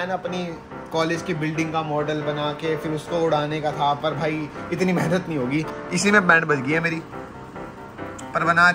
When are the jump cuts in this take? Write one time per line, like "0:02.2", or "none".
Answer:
none

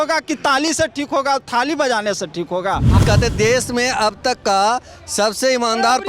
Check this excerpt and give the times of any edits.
0:02.9

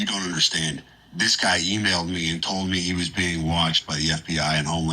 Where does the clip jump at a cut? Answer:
0:01.0

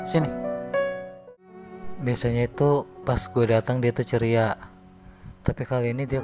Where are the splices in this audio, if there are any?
0:01.2

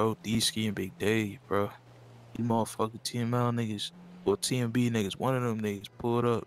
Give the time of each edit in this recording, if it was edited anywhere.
none

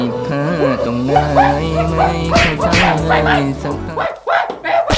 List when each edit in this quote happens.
none

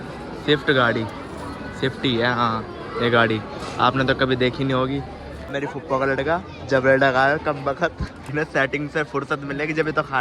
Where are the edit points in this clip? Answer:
0:05.5
0:08.2

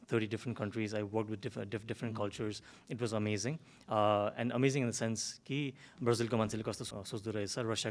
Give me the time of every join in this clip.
0:06.9

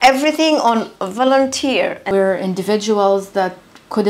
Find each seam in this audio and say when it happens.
0:02.1

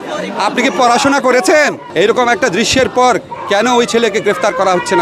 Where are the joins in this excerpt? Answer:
0:01.8

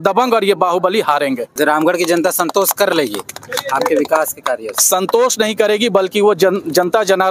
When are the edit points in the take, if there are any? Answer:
0:01.4

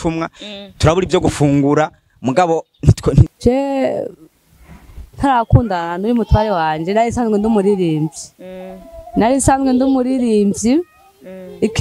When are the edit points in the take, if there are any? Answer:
0:03.3

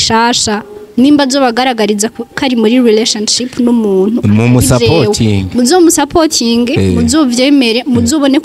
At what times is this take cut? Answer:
none

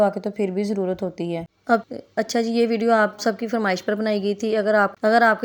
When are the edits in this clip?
0:01.8

